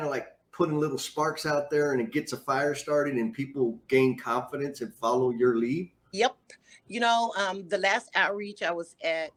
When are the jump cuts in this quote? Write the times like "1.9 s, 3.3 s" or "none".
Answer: none